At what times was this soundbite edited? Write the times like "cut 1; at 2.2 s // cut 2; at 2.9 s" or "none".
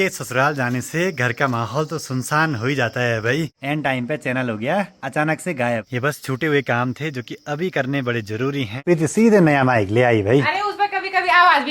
cut 1; at 3.6 s // cut 2; at 5.9 s // cut 3; at 8.8 s